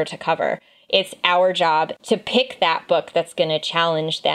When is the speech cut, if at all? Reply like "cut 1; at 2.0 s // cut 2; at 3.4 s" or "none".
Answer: cut 1; at 1.9 s